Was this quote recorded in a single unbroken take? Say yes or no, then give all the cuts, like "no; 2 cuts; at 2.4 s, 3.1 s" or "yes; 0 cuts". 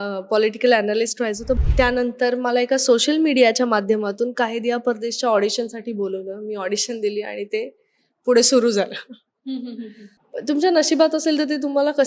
no; 2 cuts; at 1.6 s, 10.1 s